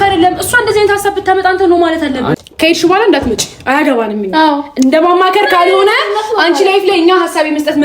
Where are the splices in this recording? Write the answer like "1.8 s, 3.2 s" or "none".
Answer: 2.3 s